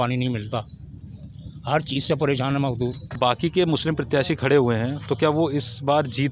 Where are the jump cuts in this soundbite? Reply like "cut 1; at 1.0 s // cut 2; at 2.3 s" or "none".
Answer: cut 1; at 3.2 s